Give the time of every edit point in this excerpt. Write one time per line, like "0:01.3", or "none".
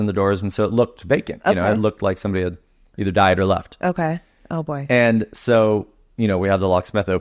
none